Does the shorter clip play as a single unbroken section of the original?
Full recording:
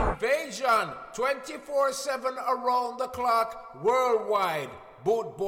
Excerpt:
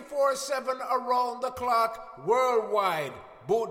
yes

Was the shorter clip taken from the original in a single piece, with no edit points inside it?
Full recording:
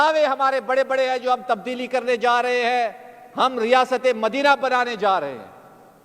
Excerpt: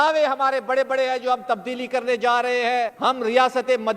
no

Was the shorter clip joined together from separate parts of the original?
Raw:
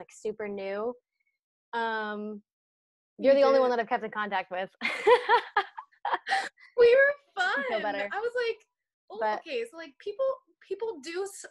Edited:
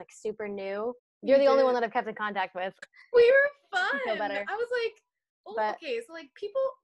yes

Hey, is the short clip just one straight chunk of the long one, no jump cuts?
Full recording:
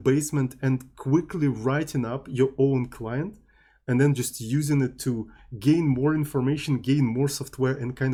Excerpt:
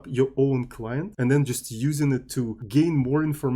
no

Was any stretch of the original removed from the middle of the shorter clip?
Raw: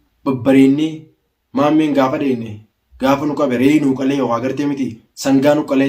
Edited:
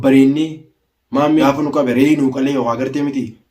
yes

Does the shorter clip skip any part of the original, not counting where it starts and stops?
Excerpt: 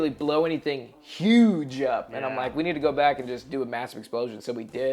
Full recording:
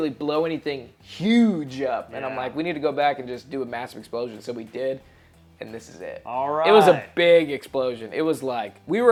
no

